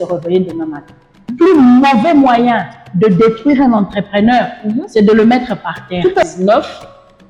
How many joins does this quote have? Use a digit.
2